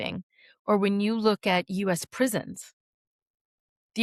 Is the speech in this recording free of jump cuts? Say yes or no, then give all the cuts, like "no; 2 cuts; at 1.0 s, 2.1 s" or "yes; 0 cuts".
yes; 0 cuts